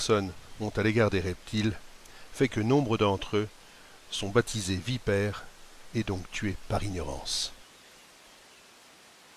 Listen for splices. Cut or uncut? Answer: cut